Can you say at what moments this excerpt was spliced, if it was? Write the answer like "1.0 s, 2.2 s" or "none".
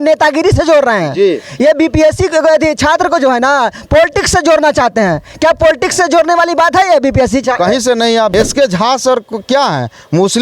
8.3 s

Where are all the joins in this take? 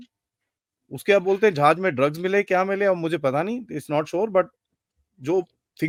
none

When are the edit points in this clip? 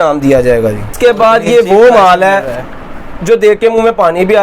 0.9 s

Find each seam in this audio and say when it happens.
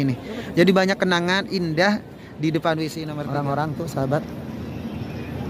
3.1 s

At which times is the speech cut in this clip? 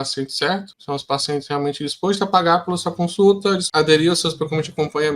3.7 s

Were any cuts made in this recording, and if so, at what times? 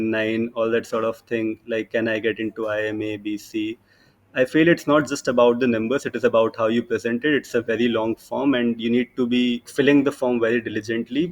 9.7 s

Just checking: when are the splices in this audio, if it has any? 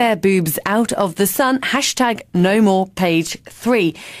none

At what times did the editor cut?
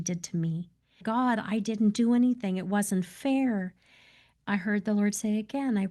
1.0 s, 4.3 s

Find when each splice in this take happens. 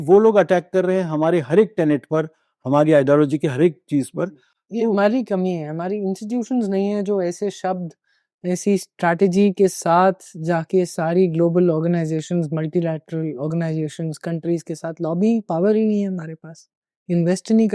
none

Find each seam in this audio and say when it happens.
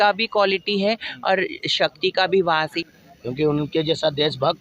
2.8 s

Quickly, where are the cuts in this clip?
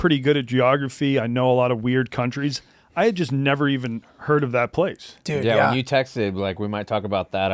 none

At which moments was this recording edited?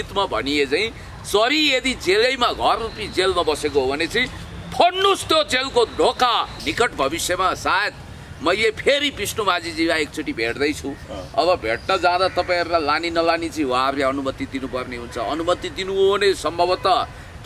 6.6 s

